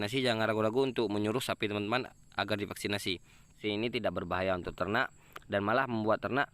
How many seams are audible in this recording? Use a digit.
1